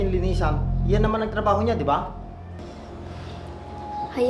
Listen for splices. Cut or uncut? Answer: uncut